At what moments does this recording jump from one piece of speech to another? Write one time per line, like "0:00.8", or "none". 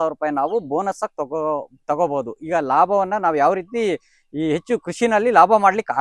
none